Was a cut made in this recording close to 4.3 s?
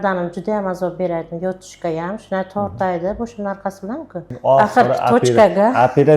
yes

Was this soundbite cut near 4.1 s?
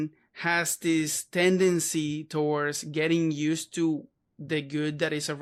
no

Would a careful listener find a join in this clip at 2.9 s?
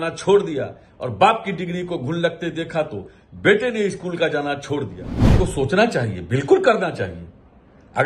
no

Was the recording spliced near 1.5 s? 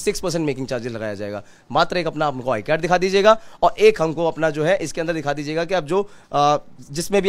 no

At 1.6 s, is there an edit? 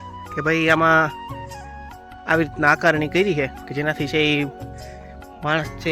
no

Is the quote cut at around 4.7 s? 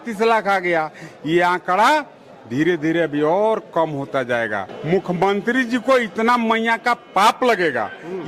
yes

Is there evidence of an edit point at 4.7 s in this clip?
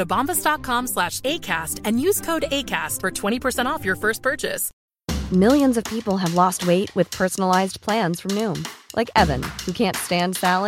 yes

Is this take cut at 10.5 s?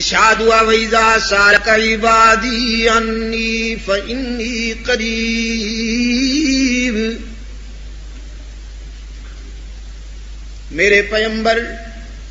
no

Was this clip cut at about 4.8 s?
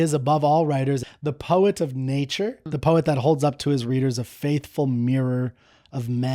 no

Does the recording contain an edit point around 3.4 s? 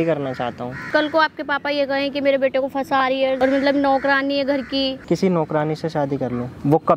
yes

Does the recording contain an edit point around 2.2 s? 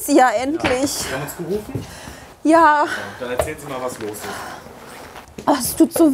no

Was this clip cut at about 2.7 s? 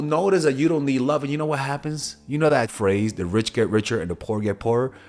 yes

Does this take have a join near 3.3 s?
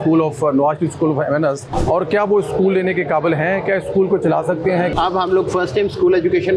no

